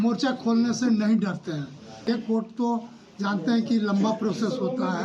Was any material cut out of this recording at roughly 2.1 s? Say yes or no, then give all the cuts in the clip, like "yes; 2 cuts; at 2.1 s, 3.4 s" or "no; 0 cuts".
yes; 1 cut; at 2.1 s